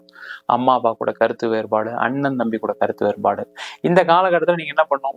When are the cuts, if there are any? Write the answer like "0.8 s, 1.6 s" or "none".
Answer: none